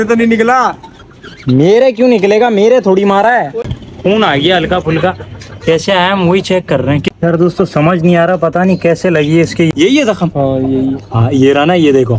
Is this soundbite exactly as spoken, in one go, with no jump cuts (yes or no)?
no